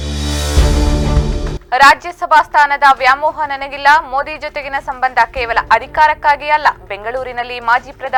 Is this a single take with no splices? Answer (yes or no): yes